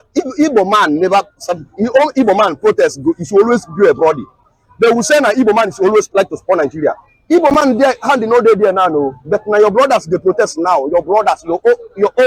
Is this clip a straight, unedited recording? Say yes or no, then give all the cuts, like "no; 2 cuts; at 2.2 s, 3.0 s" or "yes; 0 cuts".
yes; 0 cuts